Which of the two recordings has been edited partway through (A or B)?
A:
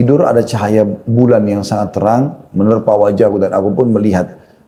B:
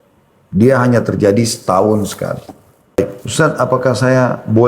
B